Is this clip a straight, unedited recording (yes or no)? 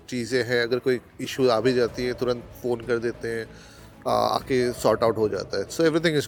yes